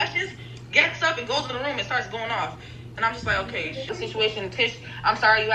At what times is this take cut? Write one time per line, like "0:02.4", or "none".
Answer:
0:03.9